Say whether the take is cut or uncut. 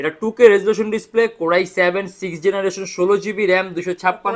uncut